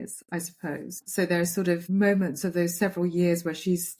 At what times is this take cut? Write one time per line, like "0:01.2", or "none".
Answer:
0:01.1
0:01.8